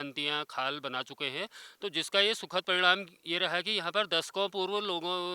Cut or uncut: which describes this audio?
uncut